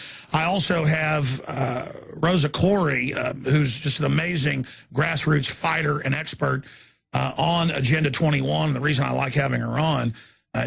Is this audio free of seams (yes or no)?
no